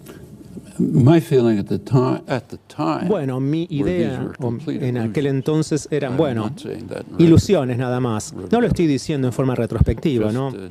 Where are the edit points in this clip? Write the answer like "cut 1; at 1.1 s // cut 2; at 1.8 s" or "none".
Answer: cut 1; at 4.2 s